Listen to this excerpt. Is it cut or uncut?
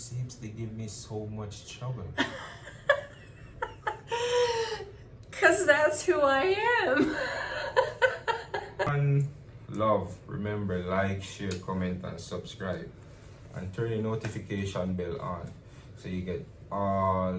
cut